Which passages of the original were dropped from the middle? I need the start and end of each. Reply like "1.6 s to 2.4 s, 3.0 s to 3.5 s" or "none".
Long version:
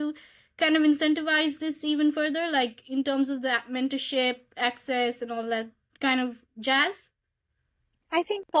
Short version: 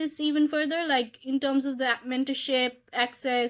none